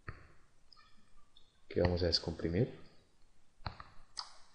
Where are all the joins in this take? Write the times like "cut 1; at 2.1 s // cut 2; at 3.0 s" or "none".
cut 1; at 2.5 s